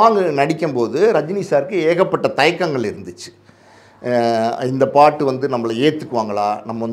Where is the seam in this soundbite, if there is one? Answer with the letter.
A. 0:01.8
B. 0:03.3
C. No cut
C